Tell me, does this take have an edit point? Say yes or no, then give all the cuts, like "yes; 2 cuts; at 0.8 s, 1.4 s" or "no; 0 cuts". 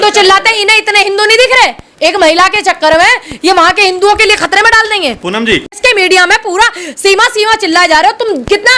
yes; 1 cut; at 5.7 s